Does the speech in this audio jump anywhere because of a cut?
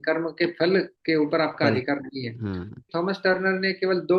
yes; 2 cuts; at 1.0 s, 2.9 s

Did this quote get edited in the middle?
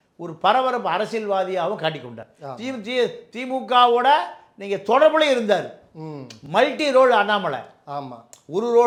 no; 0 cuts

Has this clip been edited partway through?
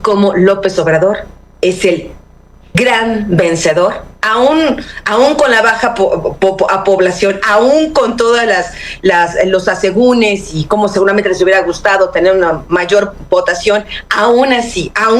no; 0 cuts

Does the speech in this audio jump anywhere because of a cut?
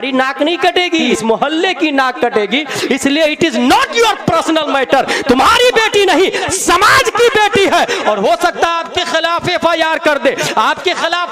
yes; 1 cut; at 1.1 s

